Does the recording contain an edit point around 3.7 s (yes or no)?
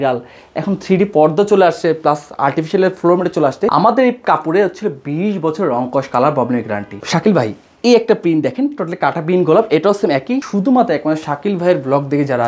yes